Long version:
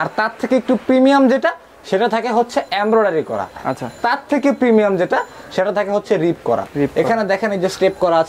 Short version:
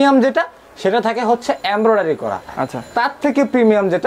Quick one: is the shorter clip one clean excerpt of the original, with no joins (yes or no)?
yes